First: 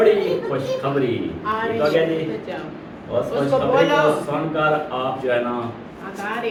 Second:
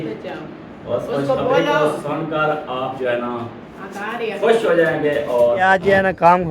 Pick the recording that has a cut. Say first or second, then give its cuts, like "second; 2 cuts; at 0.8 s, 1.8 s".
second; 1 cut; at 5.6 s